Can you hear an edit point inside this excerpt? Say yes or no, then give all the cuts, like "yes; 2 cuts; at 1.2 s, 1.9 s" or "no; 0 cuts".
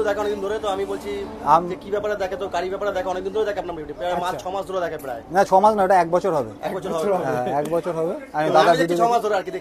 no; 0 cuts